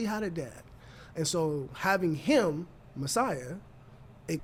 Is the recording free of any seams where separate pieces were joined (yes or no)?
yes